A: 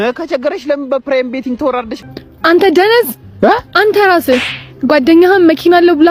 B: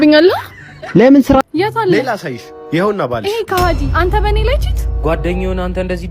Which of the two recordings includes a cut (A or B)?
B